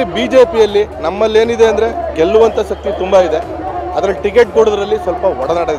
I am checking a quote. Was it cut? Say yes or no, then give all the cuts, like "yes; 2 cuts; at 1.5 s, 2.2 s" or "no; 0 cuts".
no; 0 cuts